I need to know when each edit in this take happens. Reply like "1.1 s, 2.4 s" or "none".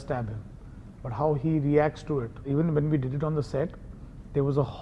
2.5 s

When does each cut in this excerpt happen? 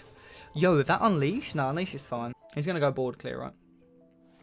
2.4 s

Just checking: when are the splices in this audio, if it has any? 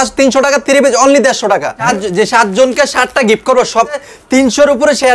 1.8 s, 4.1 s

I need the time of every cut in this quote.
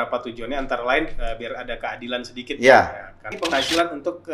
3.3 s

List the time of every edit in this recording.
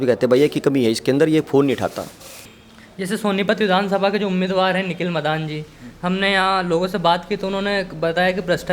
2.4 s

